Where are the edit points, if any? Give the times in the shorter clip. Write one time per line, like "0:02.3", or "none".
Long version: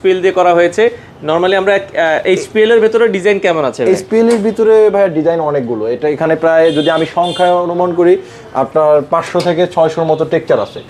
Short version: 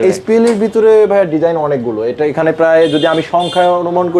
none